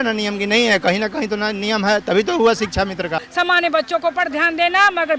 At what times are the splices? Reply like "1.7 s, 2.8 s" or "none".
3.2 s